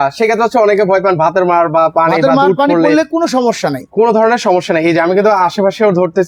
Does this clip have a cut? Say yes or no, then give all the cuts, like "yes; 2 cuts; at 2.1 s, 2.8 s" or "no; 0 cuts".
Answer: no; 0 cuts